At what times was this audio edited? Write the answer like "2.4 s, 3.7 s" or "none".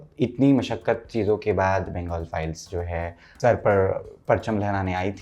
3.2 s